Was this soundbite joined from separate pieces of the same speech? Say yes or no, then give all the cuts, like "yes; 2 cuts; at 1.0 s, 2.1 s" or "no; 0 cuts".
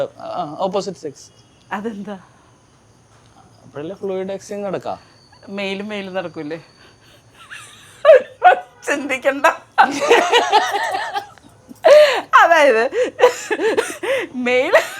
no; 0 cuts